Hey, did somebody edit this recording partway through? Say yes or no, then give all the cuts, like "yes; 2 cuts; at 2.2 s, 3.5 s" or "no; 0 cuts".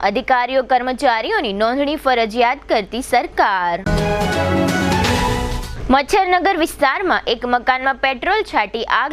no; 0 cuts